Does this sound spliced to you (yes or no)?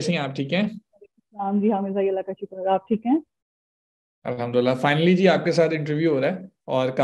no